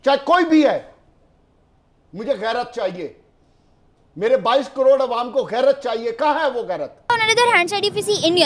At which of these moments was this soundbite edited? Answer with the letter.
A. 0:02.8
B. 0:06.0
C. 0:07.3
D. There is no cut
C